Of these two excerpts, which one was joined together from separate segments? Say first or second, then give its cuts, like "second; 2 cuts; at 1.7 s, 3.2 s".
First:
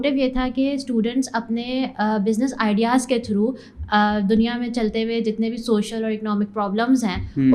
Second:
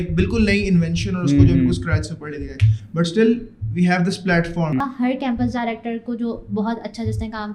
second; 1 cut; at 4.9 s